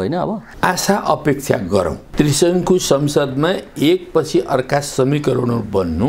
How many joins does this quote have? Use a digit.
1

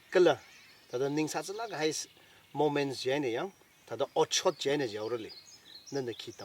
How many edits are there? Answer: 0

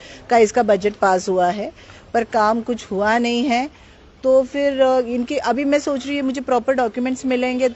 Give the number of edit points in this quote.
0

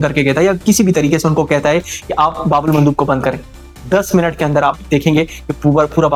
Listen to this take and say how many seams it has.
0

